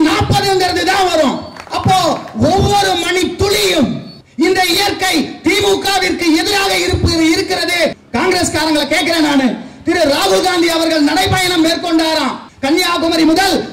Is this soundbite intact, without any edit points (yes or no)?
no